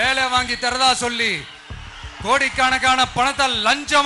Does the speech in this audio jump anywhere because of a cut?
no; 0 cuts

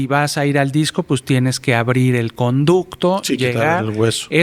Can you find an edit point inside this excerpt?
no; 0 cuts

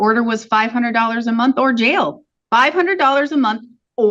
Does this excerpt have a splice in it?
yes; 1 cut; at 2.3 s

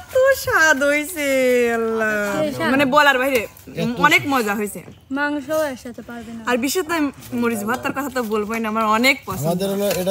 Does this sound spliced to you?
no; 0 cuts

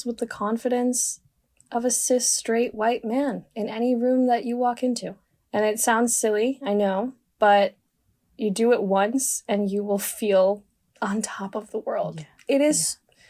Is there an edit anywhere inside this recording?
no; 0 cuts

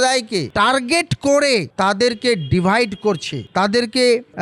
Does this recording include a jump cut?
no; 0 cuts

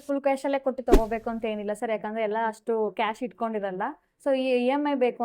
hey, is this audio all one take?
yes; 0 cuts

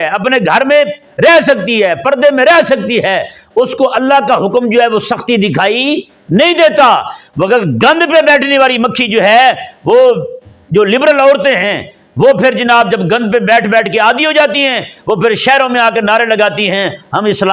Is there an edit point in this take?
no; 0 cuts

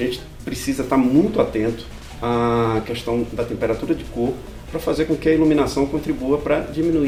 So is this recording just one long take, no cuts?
yes; 0 cuts

